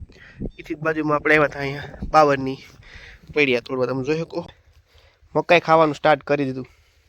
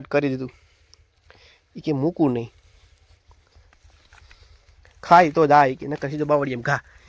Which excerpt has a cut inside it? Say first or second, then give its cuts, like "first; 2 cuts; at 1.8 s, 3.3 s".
first; 1 cut; at 4.5 s